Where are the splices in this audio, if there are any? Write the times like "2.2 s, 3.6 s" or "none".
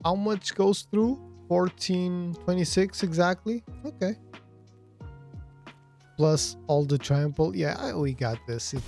1.3 s, 4.2 s, 6.1 s